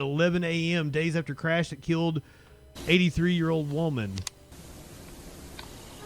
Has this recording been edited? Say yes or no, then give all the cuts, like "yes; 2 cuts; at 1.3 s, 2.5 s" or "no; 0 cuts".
yes; 1 cut; at 4.5 s